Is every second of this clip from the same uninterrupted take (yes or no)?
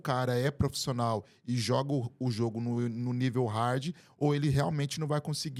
yes